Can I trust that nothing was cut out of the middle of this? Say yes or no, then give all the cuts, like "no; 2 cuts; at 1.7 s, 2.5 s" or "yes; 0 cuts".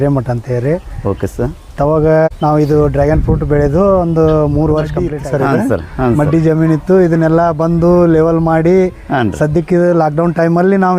no; 2 cuts; at 2.3 s, 5.1 s